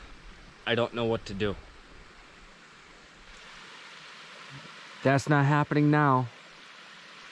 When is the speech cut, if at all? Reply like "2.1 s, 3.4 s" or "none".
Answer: 3.3 s